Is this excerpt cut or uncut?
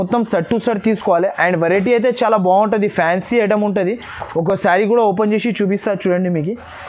uncut